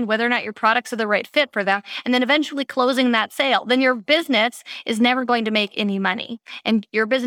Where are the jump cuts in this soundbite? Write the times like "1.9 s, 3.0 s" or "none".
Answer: none